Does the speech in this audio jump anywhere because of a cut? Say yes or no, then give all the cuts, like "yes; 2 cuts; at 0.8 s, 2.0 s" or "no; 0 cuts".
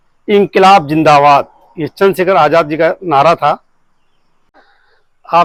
no; 0 cuts